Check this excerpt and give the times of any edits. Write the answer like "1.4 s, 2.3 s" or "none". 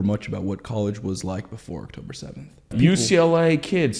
2.7 s